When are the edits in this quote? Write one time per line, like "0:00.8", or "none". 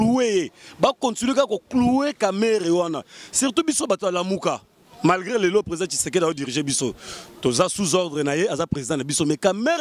none